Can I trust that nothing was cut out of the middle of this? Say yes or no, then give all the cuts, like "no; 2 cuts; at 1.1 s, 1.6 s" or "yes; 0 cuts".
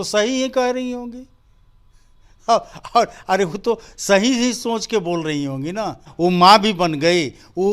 no; 1 cut; at 6.1 s